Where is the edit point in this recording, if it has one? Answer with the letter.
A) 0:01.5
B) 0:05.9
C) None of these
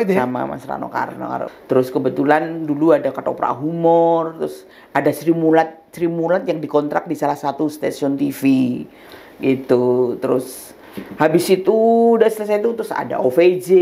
A